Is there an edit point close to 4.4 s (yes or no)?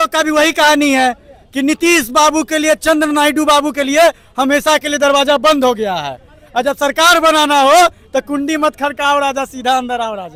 no